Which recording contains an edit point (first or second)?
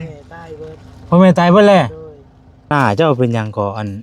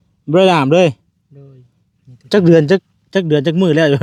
first